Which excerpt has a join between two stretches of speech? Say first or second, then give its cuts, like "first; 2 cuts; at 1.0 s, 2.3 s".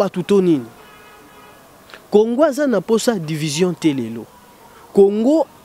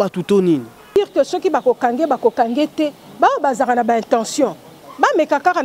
second; 1 cut; at 1.0 s